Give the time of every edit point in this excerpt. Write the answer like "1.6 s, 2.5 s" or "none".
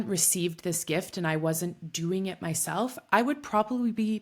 none